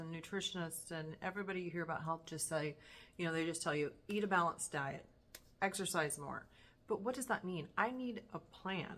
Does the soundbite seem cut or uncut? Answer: uncut